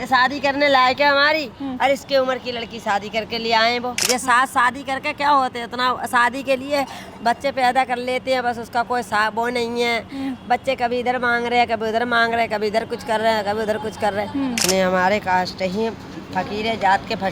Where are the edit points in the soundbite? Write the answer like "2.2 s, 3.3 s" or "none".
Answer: 4.0 s, 14.6 s